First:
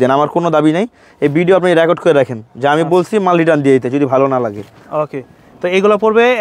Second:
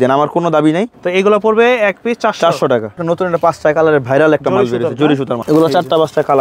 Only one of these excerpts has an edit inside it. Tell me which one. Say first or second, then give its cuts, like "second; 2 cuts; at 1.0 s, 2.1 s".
second; 3 cuts; at 1.0 s, 3.0 s, 5.4 s